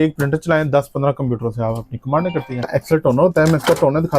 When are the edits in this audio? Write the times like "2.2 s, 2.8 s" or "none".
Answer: 2.6 s